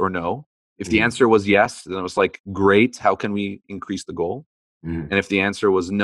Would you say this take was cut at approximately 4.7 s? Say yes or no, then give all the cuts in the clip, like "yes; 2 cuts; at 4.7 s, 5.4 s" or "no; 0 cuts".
no; 0 cuts